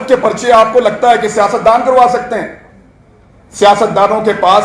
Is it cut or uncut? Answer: uncut